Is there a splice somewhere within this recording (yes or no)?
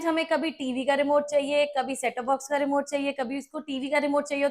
no